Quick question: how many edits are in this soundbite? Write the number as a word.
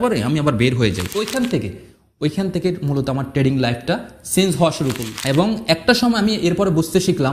two